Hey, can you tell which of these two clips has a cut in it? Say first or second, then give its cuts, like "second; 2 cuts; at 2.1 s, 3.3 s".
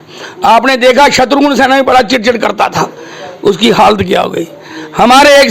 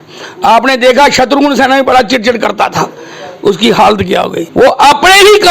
second; 1 cut; at 4.4 s